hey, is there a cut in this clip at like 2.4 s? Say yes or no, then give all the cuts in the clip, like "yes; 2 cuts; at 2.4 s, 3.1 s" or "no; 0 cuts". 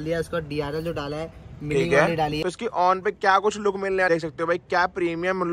yes; 2 cuts; at 2.4 s, 4.1 s